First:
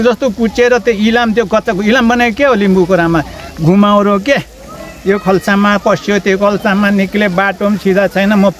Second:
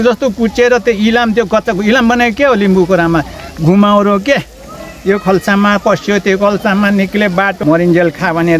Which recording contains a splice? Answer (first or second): second